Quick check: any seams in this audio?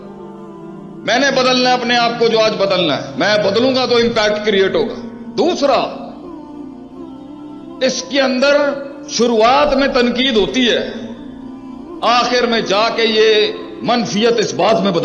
yes; 2 cuts; at 6.2 s, 7.8 s

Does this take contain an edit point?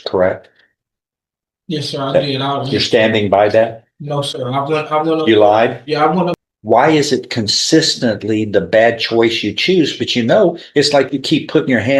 yes; 1 cut; at 6.4 s

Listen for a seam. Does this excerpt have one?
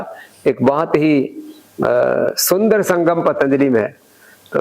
no; 0 cuts

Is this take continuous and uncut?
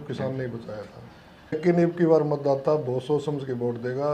no; 1 cut; at 1.6 s

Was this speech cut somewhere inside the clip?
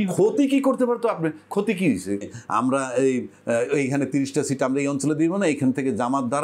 yes; 1 cut; at 2.3 s

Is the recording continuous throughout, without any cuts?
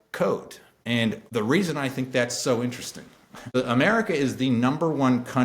no; 2 cuts; at 1.1 s, 3.6 s

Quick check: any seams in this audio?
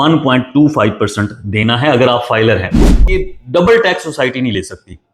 yes; 1 cut; at 3.0 s

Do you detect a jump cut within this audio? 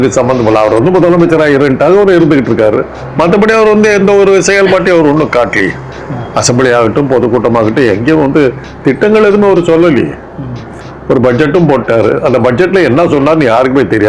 no; 0 cuts

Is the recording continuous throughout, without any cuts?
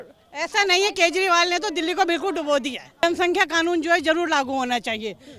no; 1 cut; at 2.8 s

